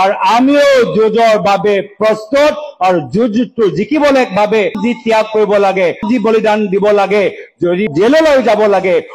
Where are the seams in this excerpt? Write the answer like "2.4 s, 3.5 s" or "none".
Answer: 4.8 s, 6.0 s, 7.9 s